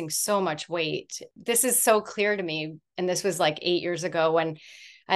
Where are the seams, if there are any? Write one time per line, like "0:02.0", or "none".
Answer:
0:01.3